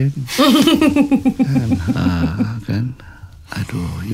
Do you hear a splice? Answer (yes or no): no